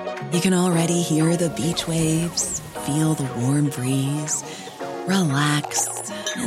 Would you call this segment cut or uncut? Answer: uncut